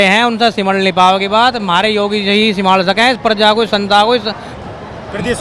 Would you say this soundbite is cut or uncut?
uncut